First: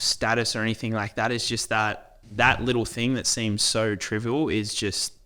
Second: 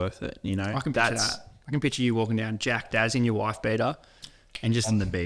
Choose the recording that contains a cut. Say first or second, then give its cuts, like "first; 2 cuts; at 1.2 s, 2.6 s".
first; 1 cut; at 2.1 s